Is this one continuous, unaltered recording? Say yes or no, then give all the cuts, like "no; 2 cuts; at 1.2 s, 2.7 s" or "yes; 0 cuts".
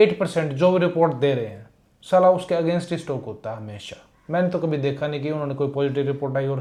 yes; 0 cuts